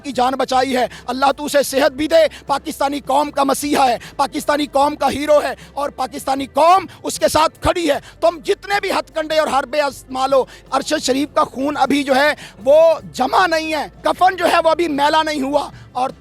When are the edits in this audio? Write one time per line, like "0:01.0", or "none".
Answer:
0:10.6
0:13.9